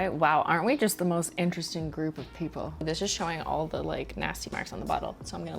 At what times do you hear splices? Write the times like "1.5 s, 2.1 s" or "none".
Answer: 2.7 s